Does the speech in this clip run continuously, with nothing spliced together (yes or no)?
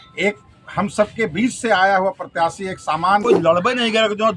no